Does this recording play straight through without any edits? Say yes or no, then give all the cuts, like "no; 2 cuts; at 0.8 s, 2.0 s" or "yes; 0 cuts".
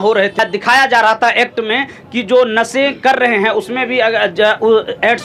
yes; 0 cuts